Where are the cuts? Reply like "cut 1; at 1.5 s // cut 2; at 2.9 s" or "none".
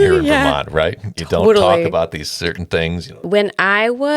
cut 1; at 3.2 s